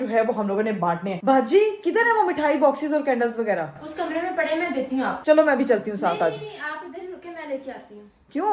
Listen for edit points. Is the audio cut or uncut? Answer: cut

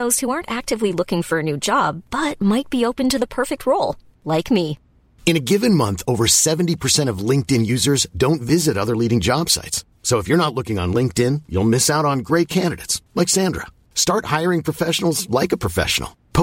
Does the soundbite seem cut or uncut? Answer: uncut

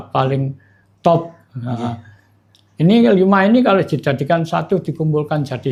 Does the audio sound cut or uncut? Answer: uncut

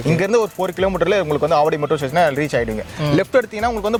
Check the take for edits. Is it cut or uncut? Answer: uncut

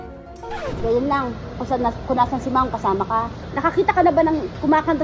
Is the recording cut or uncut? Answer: cut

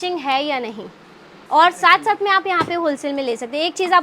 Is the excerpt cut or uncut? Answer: cut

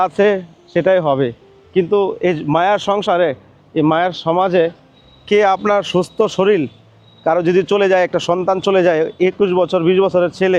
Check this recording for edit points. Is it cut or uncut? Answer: uncut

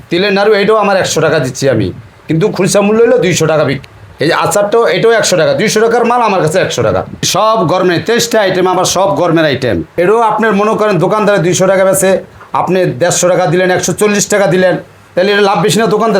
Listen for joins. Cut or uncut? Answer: cut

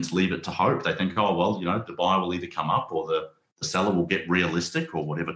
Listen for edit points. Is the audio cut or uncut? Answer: cut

